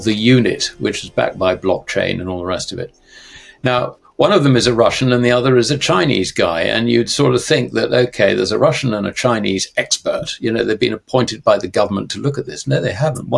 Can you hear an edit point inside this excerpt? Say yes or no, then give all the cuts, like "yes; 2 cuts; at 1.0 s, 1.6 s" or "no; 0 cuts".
no; 0 cuts